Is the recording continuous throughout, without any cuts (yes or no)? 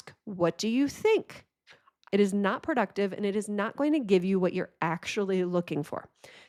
yes